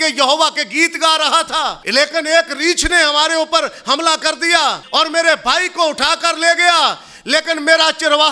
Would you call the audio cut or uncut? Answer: cut